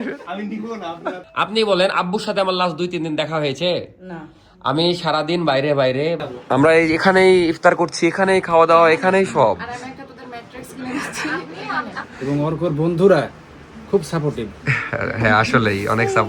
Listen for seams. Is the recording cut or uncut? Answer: cut